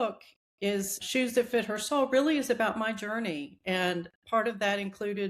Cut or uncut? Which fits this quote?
cut